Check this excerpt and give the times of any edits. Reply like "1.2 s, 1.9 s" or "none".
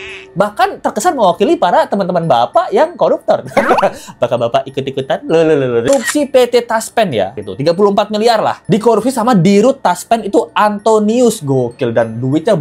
5.9 s

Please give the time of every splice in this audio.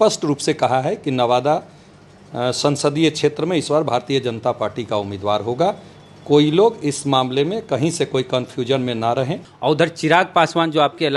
9.5 s

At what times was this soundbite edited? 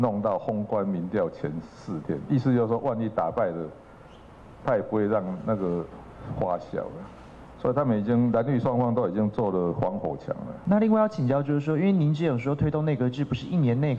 10.5 s

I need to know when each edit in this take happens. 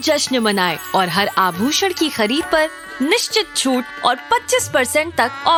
none

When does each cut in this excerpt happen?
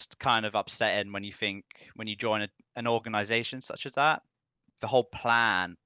4.6 s

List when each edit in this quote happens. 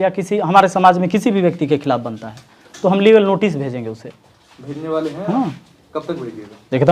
none

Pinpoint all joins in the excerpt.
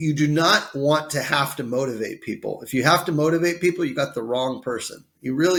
none

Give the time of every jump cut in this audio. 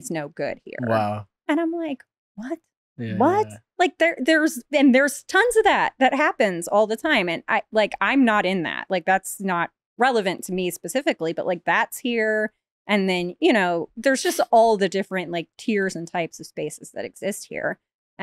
1.3 s

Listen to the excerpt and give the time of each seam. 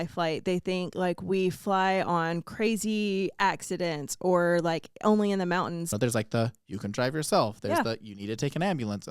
5.8 s

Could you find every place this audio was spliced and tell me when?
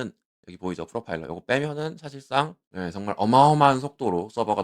2.6 s

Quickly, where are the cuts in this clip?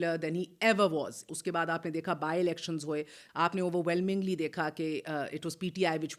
1.3 s, 3.2 s

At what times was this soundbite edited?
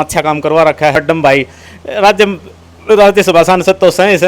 0.9 s

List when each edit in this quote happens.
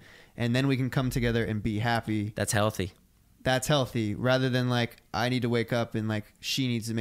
none

